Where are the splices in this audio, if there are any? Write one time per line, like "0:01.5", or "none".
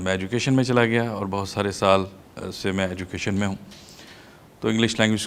none